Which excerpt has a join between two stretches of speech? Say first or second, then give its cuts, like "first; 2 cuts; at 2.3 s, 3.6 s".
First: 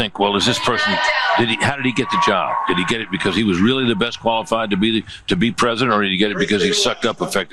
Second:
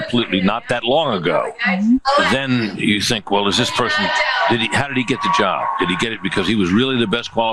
second; 1 cut; at 2.0 s